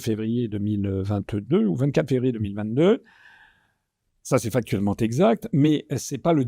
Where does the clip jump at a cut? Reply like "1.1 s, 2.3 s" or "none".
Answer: none